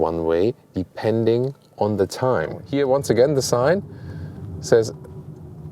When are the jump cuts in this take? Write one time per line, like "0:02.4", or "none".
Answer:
0:02.6